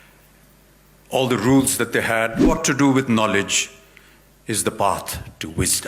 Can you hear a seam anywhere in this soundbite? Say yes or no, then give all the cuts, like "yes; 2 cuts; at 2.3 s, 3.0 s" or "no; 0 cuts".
yes; 1 cut; at 2.5 s